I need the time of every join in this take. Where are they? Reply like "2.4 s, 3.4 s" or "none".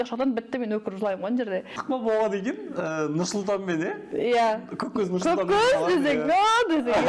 1.8 s

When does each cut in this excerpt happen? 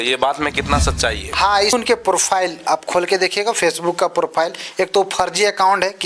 1.7 s

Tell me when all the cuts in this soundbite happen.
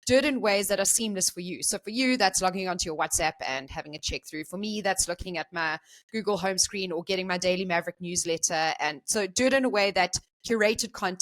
10.3 s

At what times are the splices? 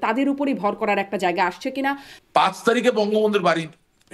2.1 s

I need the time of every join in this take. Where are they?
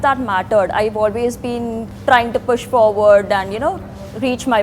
1.9 s

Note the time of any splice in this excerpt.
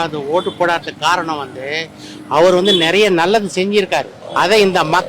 4.2 s

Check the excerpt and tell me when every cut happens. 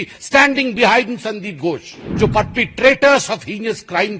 2.0 s

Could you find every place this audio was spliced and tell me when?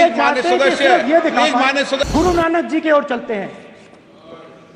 2.0 s

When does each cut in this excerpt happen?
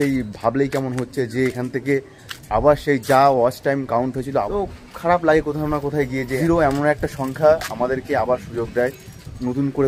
4.5 s, 6.3 s

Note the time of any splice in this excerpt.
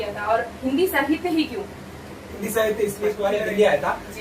3.2 s

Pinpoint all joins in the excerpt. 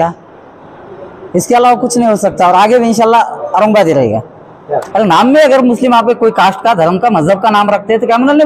4.9 s

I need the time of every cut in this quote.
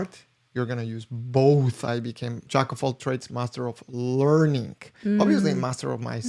2.3 s

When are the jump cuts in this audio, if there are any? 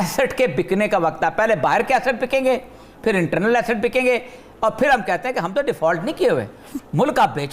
none

